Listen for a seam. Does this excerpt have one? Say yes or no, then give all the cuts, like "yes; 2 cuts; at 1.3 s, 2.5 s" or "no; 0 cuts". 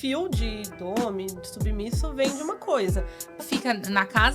yes; 1 cut; at 3.4 s